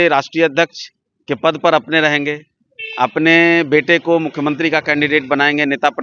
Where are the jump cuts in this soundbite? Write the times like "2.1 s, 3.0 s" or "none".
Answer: none